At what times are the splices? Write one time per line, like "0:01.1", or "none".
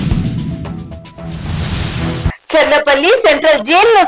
0:02.2